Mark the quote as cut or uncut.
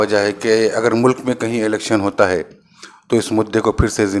uncut